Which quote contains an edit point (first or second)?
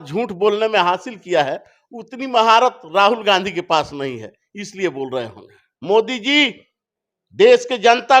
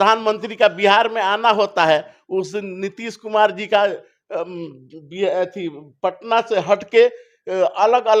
first